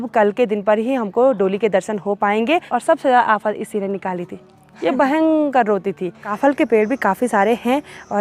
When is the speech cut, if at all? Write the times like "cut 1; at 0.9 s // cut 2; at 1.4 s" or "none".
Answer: cut 1; at 2.7 s // cut 2; at 6.2 s